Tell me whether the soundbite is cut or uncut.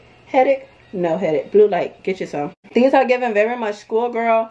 cut